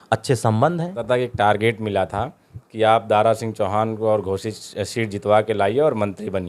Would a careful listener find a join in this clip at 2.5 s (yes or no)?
no